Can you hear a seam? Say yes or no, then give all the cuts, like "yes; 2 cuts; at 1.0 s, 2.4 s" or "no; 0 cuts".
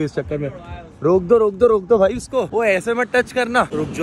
no; 0 cuts